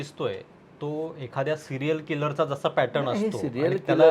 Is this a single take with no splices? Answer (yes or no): yes